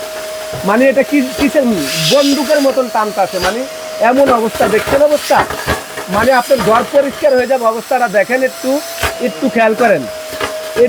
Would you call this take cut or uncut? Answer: uncut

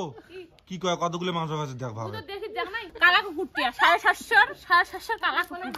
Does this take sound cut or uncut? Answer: cut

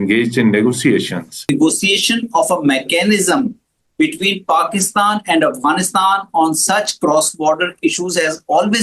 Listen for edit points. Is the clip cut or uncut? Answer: cut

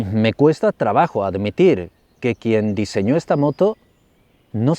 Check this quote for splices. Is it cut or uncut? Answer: uncut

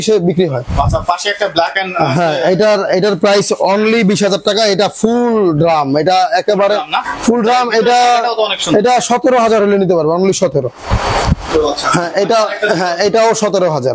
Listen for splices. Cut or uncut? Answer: uncut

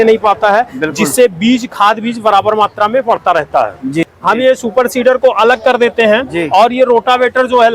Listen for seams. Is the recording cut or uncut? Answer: cut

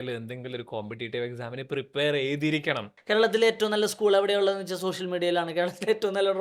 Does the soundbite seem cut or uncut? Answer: cut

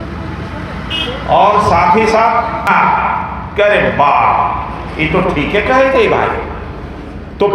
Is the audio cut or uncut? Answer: cut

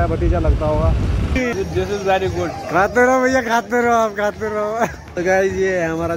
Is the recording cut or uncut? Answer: cut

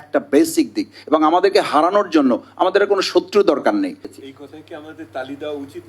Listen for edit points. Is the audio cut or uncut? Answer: cut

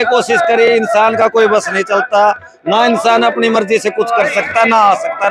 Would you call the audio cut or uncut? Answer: uncut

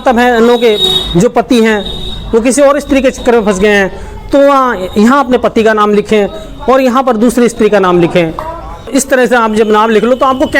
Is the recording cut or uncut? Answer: cut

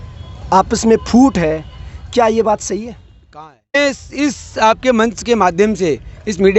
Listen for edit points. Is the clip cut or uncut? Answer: cut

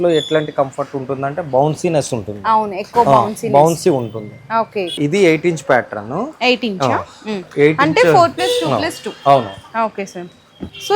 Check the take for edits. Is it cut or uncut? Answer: uncut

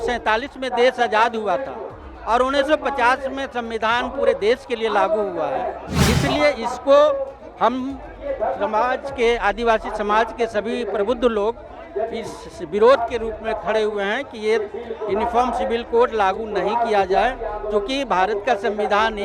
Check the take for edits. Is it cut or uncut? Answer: cut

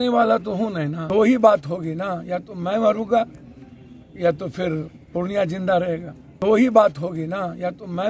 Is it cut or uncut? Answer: cut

